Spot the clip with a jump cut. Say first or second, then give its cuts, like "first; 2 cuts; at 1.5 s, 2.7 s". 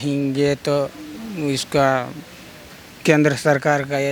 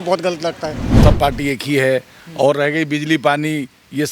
second; 1 cut; at 1.0 s